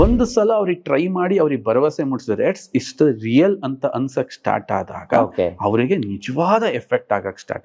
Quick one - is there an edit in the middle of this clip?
no; 0 cuts

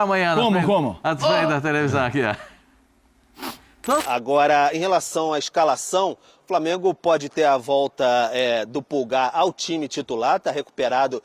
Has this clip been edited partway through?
yes; 1 cut; at 4.0 s

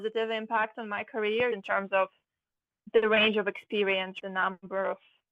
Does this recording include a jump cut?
yes; 2 cuts; at 1.5 s, 4.2 s

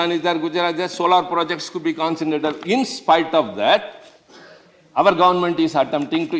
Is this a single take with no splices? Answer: yes; 0 cuts

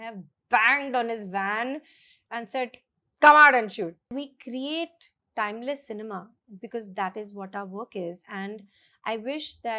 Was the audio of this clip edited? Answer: yes; 1 cut; at 4.1 s

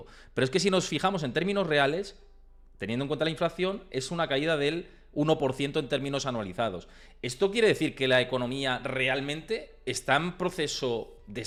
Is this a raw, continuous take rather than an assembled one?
yes; 0 cuts

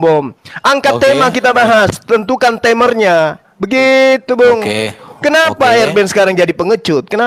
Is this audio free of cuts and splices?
yes; 0 cuts

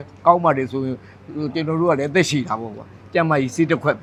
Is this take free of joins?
yes; 0 cuts

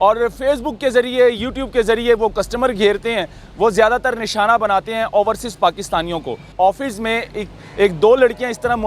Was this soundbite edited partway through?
yes; 1 cut; at 6.5 s

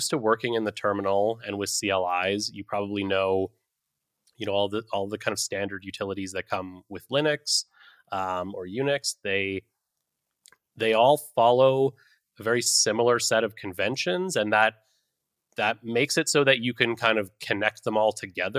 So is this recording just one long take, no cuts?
yes; 0 cuts

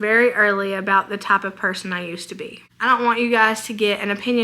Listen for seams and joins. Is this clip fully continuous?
no; 1 cut; at 2.6 s

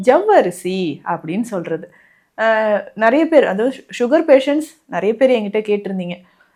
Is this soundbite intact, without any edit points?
yes; 0 cuts

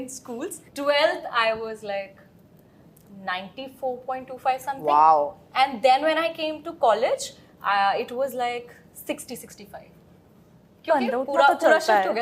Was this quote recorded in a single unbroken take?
yes; 0 cuts

